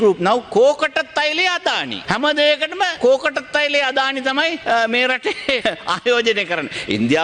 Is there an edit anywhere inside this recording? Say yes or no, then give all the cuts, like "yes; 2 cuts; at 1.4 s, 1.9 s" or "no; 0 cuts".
yes; 4 cuts; at 1.9 s, 2.9 s, 4.6 s, 5.6 s